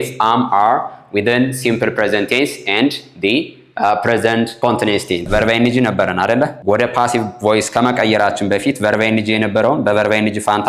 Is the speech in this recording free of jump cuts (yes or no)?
no